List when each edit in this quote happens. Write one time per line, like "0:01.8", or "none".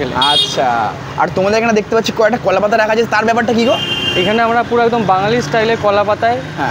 none